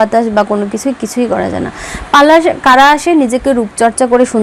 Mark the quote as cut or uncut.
uncut